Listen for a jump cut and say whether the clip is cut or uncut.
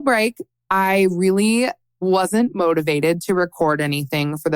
cut